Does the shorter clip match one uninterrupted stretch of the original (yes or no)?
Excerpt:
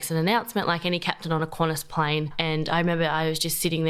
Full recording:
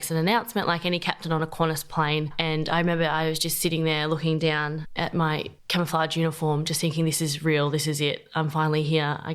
yes